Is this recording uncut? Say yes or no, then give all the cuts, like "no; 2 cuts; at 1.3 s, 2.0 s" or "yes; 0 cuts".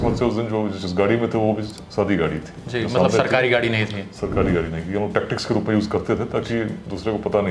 yes; 0 cuts